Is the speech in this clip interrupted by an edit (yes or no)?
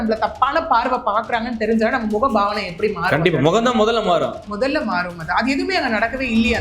no